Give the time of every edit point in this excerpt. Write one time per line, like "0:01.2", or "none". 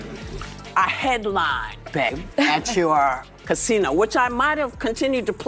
0:02.2